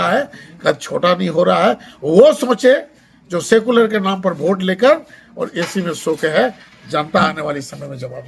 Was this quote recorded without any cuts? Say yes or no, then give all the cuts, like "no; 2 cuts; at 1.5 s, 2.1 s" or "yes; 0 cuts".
yes; 0 cuts